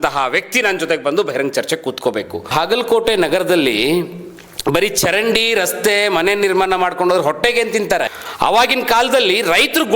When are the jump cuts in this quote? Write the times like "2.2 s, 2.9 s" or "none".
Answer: 2.5 s, 8.2 s